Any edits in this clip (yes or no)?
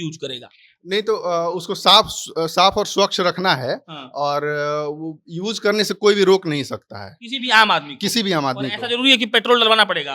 no